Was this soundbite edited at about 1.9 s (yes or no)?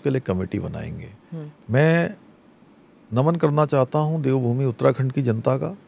no